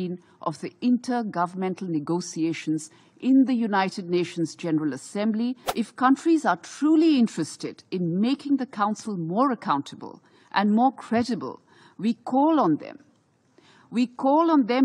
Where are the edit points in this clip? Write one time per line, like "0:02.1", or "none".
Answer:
0:05.6